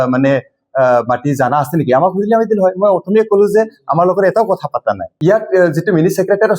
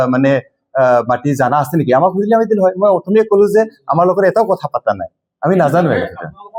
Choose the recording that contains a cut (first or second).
first